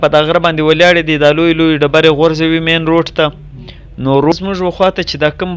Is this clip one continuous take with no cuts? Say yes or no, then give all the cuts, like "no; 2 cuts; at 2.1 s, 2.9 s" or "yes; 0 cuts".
no; 1 cut; at 4.3 s